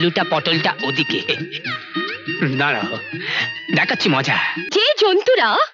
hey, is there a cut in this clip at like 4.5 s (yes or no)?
yes